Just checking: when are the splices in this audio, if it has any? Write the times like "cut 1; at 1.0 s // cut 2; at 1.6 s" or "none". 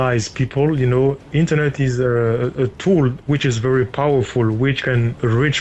none

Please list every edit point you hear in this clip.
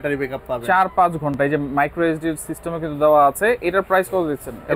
none

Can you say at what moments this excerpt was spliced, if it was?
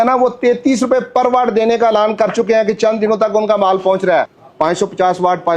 cut 1; at 4.4 s

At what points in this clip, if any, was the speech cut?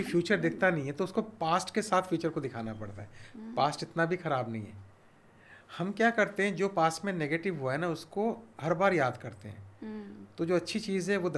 none

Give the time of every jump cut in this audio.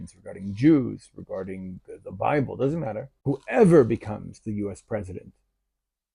cut 1; at 3.1 s

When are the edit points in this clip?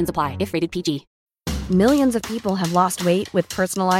cut 1; at 1.1 s

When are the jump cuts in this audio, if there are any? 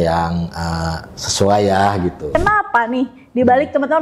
cut 1; at 2.4 s

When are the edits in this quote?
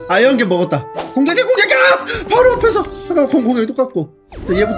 cut 1; at 1.0 s

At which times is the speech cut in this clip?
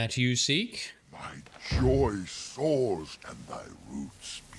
cut 1; at 3.2 s

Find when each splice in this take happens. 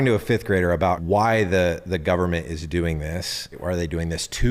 cut 1; at 1.0 s // cut 2; at 3.6 s

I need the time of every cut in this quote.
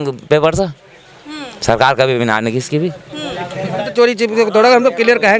cut 1; at 3.8 s

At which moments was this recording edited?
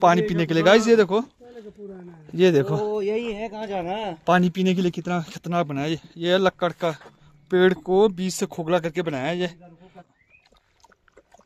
cut 1; at 10.0 s

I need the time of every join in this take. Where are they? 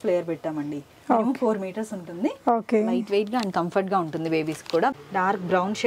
cut 1; at 4.9 s

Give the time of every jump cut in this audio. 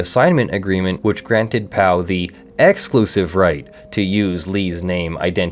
cut 1; at 1.0 s

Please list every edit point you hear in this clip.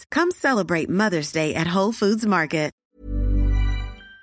cut 1; at 2.8 s

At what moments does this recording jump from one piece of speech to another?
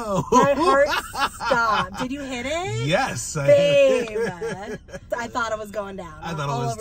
cut 1; at 5.1 s

